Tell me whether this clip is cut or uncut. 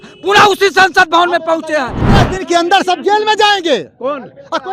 cut